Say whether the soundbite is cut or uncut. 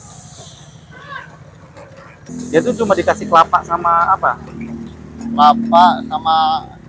cut